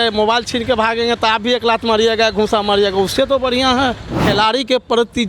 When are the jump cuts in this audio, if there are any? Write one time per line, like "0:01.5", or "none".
0:04.2